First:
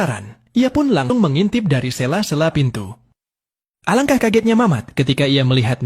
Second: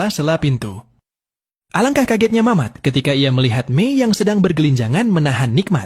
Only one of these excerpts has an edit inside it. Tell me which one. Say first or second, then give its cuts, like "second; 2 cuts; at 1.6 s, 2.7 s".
first; 1 cut; at 1.1 s